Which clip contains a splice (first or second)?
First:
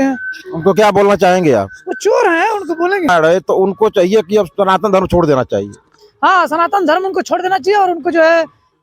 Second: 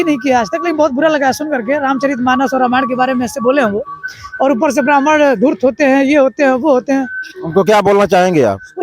first